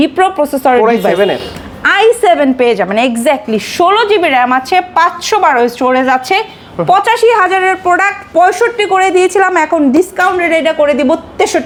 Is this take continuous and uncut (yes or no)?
yes